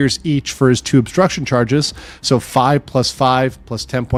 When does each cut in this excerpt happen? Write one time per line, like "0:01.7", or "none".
none